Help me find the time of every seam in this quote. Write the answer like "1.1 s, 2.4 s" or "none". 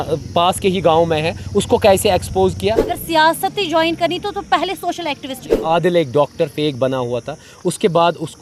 2.9 s, 5.6 s